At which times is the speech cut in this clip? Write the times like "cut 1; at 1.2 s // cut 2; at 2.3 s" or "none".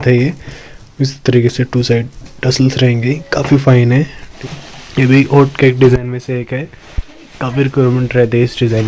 cut 1; at 4.3 s